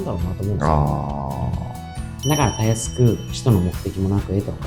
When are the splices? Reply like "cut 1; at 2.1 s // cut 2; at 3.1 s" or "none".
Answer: cut 1; at 2.0 s